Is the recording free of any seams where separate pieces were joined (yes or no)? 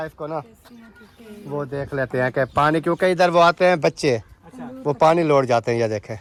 yes